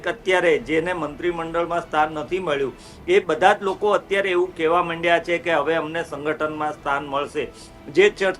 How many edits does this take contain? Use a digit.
0